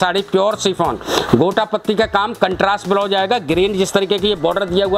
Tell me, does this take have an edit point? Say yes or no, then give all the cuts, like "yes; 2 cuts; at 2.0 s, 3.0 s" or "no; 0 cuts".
no; 0 cuts